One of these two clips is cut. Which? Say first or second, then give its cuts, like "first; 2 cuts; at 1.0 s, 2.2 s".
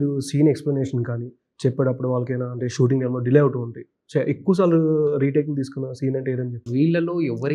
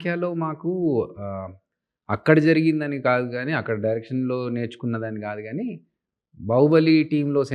first; 1 cut; at 6.6 s